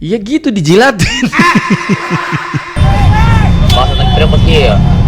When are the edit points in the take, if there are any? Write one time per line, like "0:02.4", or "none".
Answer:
none